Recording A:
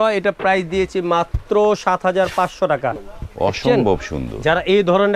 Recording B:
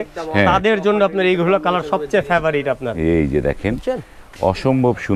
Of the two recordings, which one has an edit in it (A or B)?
A